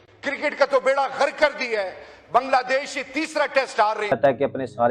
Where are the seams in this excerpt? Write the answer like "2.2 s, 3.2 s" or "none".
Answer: 4.0 s